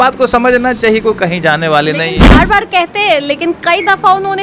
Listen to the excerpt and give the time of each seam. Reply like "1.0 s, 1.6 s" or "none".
none

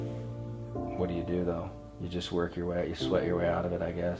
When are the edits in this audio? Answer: 1.0 s

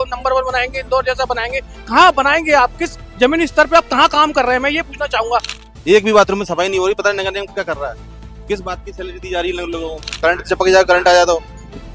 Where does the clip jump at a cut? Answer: 5.5 s, 10.0 s

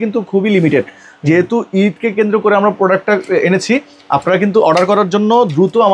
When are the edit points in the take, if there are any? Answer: none

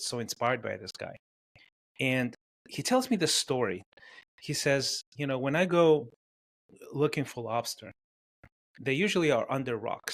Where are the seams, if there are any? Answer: 3.8 s

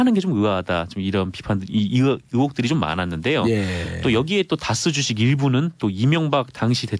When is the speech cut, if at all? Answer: none

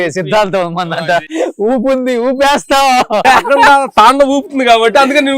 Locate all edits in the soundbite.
1.2 s, 3.2 s

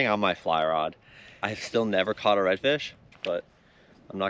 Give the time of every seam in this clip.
1.5 s, 3.1 s

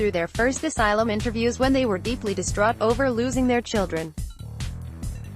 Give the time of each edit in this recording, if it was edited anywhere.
4.1 s

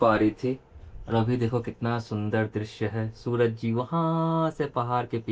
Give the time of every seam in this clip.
none

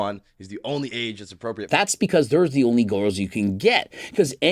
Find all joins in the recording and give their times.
1.6 s

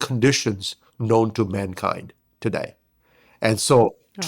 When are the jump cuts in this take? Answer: none

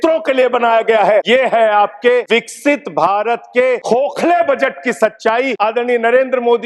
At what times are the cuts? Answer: 1.2 s, 2.3 s, 3.8 s, 5.5 s

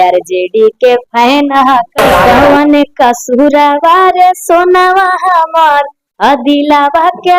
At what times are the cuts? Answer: 2.2 s

